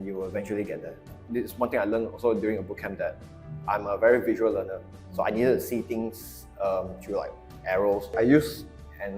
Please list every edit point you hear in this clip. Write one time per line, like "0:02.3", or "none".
0:01.1
0:08.2